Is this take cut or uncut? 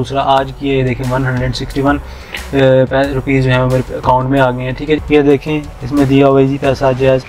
cut